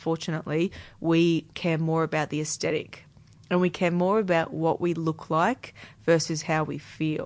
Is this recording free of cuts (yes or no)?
yes